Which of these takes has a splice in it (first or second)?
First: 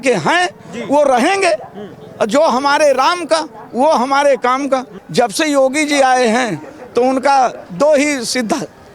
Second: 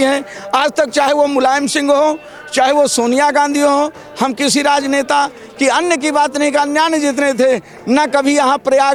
first